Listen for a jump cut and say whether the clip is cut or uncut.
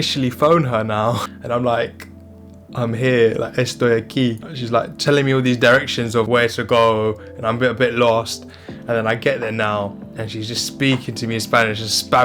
uncut